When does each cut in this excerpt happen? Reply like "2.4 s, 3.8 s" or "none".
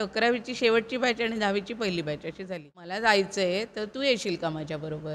2.8 s